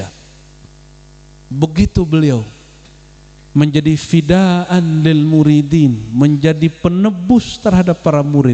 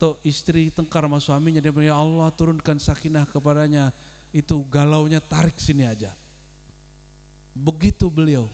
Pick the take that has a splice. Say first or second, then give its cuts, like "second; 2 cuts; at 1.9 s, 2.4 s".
second; 1 cut; at 1.0 s